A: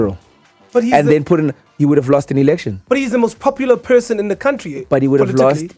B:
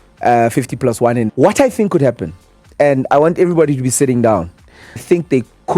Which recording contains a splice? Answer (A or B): B